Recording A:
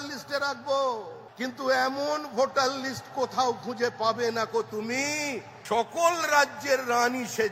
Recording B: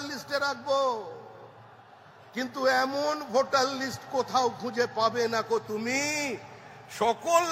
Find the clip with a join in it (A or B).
A